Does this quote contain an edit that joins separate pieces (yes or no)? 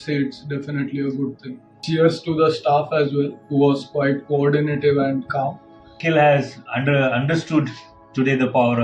yes